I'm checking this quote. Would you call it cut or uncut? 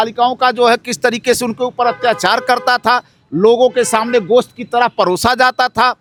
uncut